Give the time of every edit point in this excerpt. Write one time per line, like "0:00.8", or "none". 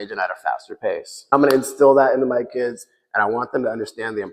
0:01.1